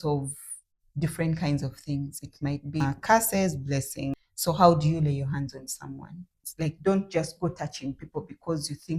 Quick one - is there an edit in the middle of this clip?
yes; 3 cuts; at 2.8 s, 4.1 s, 6.4 s

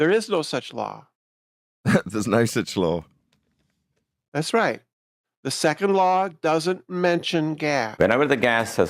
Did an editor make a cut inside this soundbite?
yes; 1 cut; at 7.9 s

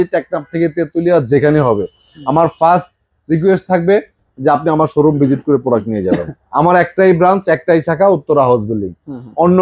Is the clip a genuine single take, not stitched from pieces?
yes; 0 cuts

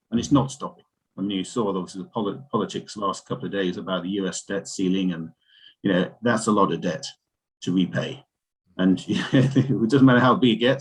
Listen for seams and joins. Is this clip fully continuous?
yes; 0 cuts

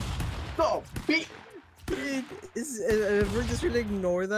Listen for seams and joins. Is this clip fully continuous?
yes; 0 cuts

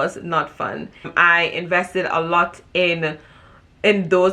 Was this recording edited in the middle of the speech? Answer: yes; 1 cut; at 1.1 s

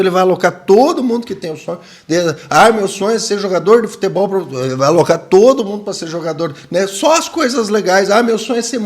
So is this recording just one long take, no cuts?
yes; 0 cuts

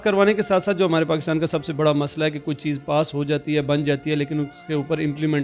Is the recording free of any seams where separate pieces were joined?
yes; 0 cuts

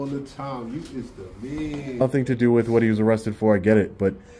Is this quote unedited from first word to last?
no; 1 cut; at 2.0 s

